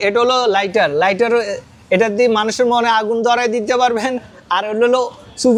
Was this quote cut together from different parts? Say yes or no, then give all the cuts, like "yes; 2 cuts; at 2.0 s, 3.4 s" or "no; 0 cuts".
no; 0 cuts